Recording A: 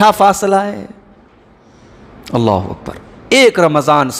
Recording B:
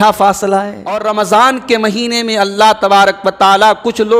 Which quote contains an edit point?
B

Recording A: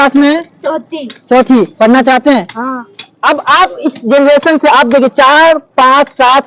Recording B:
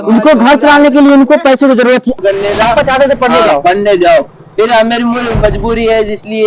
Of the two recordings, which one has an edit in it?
B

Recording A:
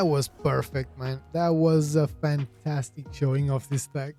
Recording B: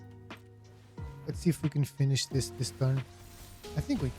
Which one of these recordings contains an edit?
B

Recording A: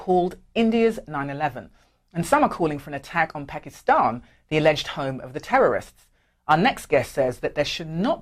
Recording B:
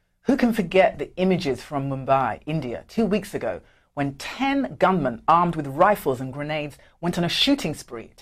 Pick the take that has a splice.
B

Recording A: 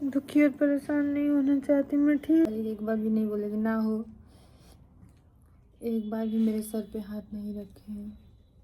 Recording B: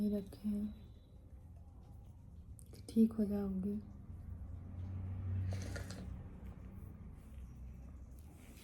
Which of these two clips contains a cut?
A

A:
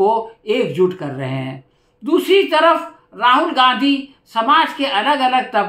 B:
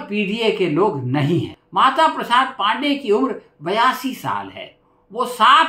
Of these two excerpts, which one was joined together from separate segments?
B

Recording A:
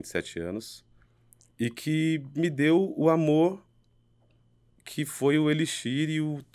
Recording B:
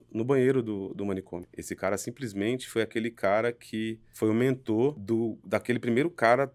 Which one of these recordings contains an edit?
B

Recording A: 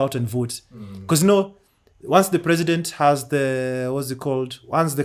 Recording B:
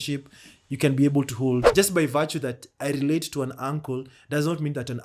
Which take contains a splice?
B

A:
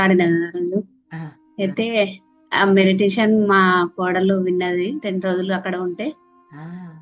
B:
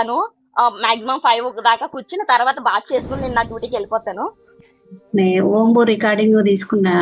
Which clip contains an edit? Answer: B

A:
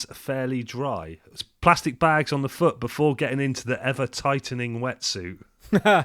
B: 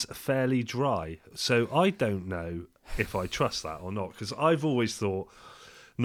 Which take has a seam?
A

